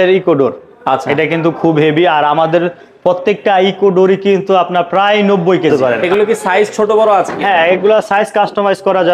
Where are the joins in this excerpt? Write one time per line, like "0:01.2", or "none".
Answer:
0:05.7